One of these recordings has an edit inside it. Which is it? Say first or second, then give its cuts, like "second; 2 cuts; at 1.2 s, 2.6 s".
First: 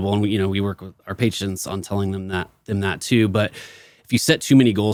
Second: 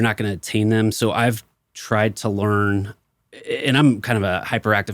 second; 1 cut; at 3.0 s